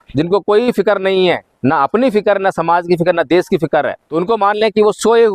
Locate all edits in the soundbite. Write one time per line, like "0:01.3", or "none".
0:04.0